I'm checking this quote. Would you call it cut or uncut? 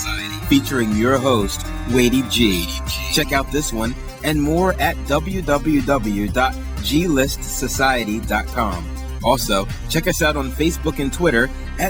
uncut